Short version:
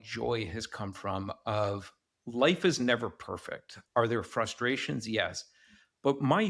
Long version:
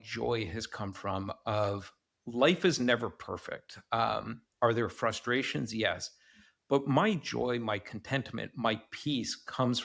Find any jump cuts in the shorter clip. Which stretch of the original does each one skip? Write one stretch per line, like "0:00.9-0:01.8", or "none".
0:03.7-0:04.4